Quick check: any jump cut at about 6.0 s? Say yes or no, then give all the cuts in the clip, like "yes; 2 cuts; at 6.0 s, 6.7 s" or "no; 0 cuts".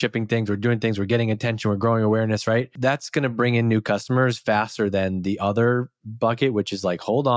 no; 1 cut; at 2.7 s